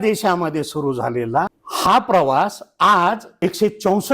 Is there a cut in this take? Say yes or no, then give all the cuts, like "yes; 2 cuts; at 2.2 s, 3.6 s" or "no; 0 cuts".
yes; 2 cuts; at 1.6 s, 3.4 s